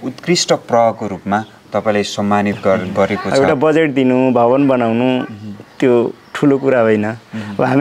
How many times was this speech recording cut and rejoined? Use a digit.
1